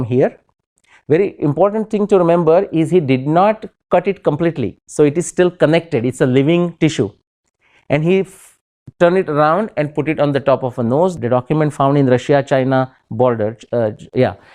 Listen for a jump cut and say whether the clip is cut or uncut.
cut